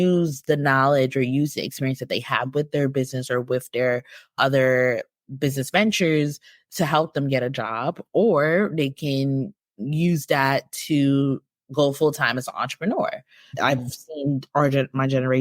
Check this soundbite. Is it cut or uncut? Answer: cut